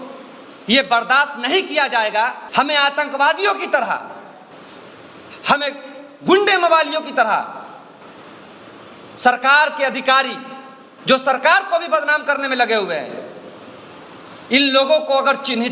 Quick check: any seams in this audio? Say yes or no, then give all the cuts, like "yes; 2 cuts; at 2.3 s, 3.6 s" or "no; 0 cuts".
yes; 1 cut; at 2.4 s